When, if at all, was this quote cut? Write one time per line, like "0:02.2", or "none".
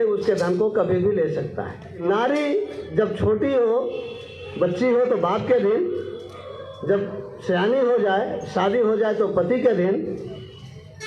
0:02.0